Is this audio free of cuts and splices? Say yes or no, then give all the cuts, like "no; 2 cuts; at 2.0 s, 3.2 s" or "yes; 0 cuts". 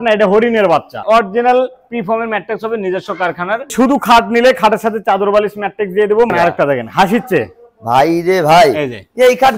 no; 3 cuts; at 1.0 s, 3.7 s, 6.3 s